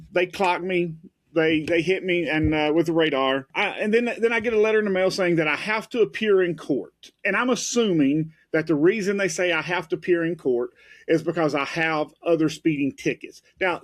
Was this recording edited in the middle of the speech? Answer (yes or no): yes